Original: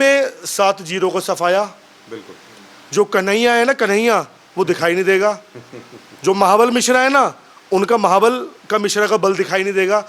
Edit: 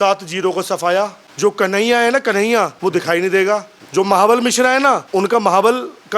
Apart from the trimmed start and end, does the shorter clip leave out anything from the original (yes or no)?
yes